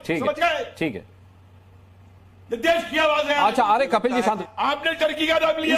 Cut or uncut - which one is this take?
cut